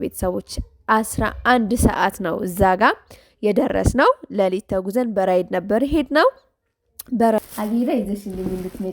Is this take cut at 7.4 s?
yes; 1 cut; at 7.4 s

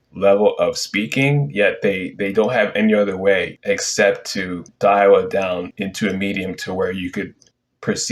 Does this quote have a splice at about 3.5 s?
yes; 3 cuts; at 3.5 s, 4.6 s, 5.7 s

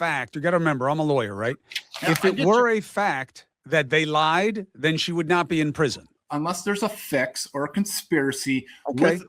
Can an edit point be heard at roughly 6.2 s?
yes; 1 cut; at 6.2 s

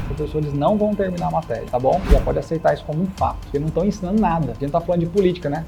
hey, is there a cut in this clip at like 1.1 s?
no; 2 cuts; at 3.4 s, 4.5 s

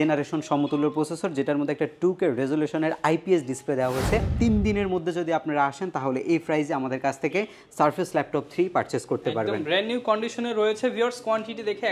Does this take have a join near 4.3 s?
yes; 1 cut; at 4.3 s

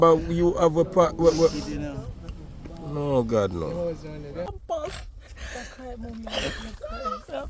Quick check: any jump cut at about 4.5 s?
yes; 1 cut; at 4.5 s

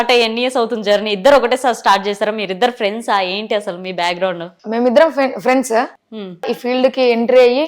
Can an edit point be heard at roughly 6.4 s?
yes; 1 cut; at 6.4 s

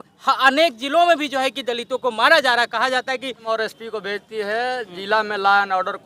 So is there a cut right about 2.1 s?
no; 1 cut; at 3.5 s

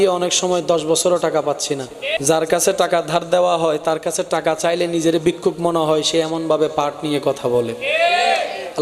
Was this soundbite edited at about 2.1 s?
yes; 1 cut; at 2.1 s

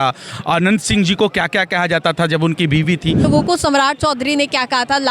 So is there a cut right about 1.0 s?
no; 1 cut; at 3.2 s

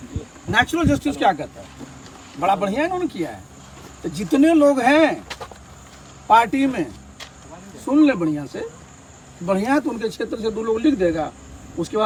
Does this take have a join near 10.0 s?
no; 0 cuts

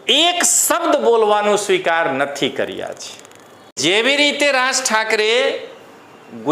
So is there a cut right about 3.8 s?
yes; 1 cut; at 3.8 s

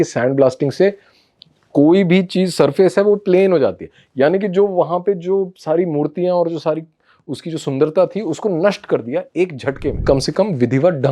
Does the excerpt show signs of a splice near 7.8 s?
no; 1 cut; at 10.0 s

